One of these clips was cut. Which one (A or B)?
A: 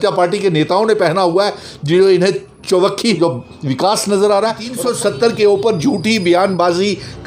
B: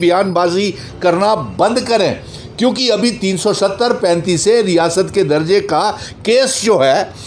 A